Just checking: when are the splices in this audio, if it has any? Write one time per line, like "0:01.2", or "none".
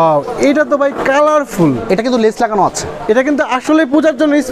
none